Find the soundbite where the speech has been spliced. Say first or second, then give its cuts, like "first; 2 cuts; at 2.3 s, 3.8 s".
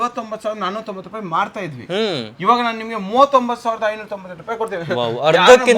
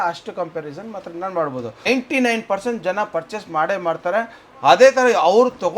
second; 1 cut; at 1.9 s